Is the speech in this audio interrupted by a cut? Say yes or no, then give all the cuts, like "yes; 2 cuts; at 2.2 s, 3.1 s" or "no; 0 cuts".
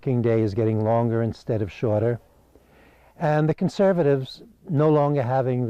yes; 1 cut; at 3.9 s